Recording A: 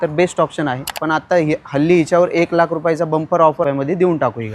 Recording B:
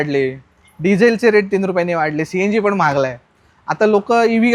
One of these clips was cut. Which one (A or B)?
A